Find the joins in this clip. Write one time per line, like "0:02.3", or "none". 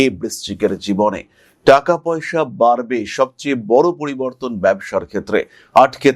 none